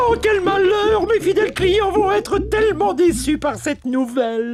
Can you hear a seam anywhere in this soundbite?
no; 0 cuts

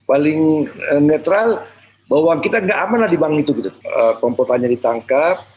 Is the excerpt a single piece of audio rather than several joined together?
no; 1 cut; at 3.8 s

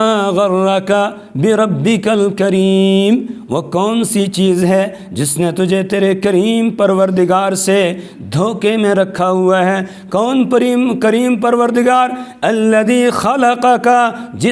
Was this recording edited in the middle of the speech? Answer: no; 0 cuts

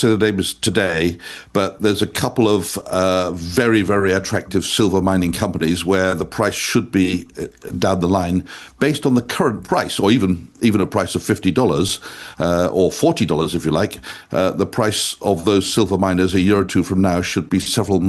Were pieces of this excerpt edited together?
no; 0 cuts

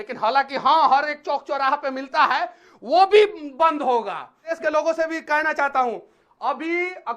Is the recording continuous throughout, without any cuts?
no; 1 cut; at 4.6 s

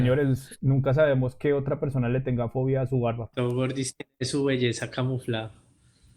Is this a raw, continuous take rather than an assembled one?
no; 1 cut; at 3.3 s

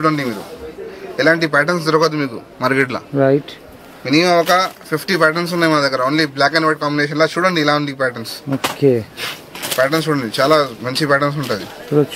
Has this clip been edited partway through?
no; 0 cuts

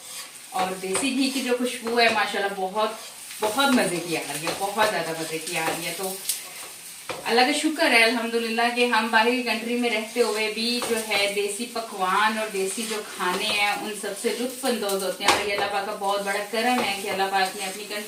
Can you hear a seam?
no; 0 cuts

